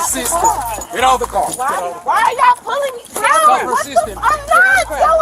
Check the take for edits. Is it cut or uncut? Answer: cut